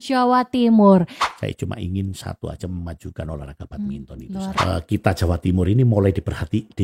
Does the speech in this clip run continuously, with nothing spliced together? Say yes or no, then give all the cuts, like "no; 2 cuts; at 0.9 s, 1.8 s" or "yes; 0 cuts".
no; 2 cuts; at 1.2 s, 4.5 s